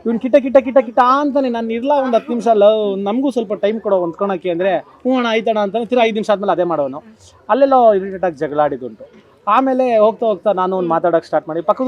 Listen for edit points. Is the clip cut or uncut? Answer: uncut